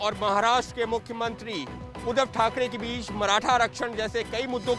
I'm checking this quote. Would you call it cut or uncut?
uncut